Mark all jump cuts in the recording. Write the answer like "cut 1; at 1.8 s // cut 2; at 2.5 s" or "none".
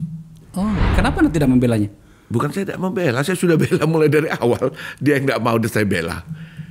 cut 1; at 0.9 s